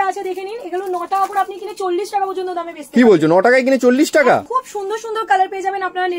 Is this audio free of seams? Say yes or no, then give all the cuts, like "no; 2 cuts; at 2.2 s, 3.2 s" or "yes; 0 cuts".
no; 1 cut; at 4.5 s